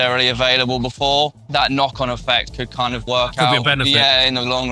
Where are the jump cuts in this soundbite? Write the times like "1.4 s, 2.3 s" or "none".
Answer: 1.4 s, 3.0 s